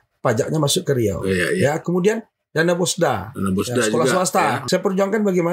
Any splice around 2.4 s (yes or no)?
no